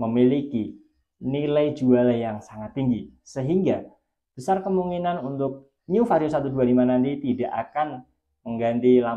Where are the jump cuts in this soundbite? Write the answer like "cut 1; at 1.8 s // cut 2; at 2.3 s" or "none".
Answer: none